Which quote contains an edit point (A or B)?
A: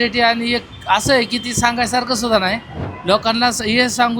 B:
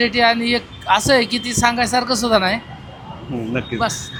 A